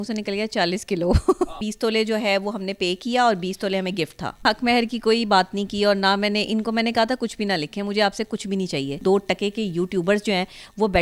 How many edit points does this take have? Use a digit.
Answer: 3